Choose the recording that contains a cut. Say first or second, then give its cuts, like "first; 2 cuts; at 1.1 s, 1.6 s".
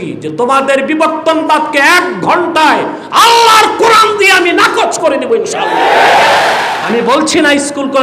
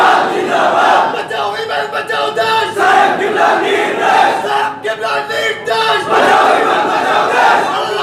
first; 1 cut; at 6.6 s